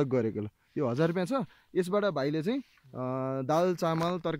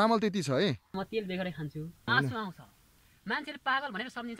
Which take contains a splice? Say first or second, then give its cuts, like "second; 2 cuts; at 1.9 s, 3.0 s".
second; 2 cuts; at 0.9 s, 2.0 s